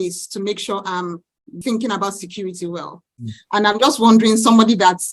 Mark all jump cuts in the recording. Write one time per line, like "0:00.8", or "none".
0:01.6
0:03.4

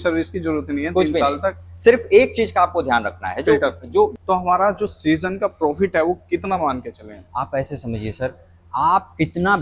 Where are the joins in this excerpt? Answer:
0:04.2

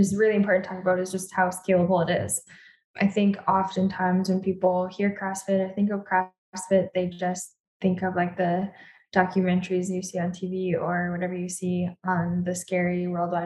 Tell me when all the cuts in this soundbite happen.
0:02.7

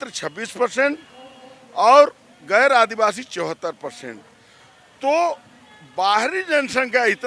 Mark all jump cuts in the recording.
none

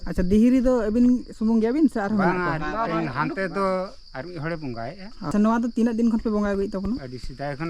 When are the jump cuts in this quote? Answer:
0:05.3

